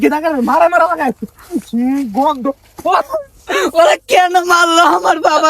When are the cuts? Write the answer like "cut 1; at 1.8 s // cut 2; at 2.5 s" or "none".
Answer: cut 1; at 3.0 s